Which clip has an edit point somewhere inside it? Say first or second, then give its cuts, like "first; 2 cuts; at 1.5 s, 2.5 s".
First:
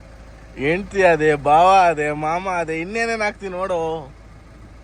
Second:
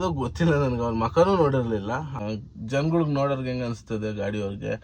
second; 1 cut; at 2.1 s